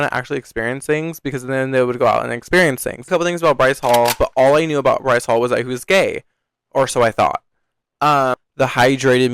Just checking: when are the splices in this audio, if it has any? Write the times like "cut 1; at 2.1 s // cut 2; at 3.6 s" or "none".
cut 1; at 3.1 s // cut 2; at 8.4 s